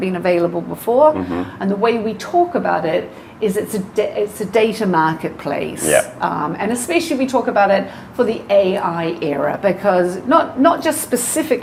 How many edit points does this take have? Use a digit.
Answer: 0